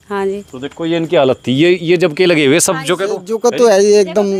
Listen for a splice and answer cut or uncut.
uncut